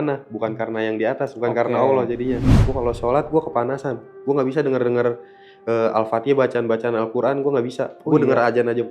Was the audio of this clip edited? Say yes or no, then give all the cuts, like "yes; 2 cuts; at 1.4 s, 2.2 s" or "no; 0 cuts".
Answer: yes; 1 cut; at 2.5 s